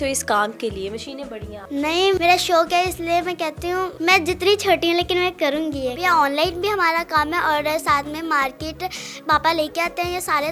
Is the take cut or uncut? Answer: cut